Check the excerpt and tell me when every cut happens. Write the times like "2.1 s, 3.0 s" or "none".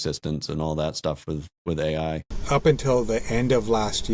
2.3 s